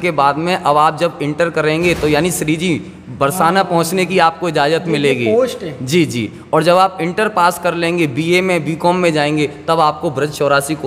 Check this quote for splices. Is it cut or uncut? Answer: uncut